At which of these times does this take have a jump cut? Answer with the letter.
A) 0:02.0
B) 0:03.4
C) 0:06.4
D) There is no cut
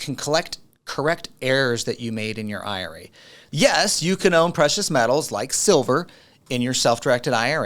B